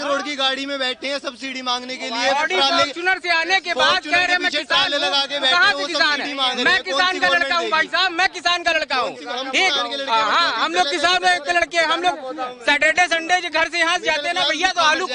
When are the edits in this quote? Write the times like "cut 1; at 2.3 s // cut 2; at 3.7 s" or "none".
none